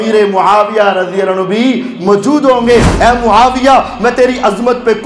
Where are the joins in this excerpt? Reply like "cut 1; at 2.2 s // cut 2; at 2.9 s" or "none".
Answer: cut 1; at 2.9 s